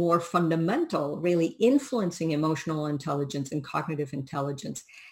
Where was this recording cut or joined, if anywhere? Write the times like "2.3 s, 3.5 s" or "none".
none